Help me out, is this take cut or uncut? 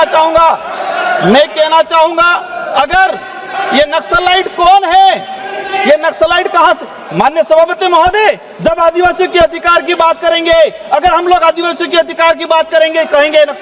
uncut